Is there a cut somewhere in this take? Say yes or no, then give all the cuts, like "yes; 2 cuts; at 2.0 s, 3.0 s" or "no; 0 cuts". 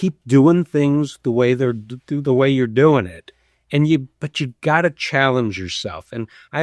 no; 0 cuts